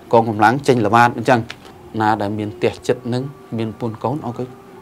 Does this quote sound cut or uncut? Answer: cut